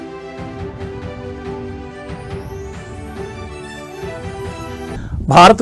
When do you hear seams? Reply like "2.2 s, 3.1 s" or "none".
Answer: 4.1 s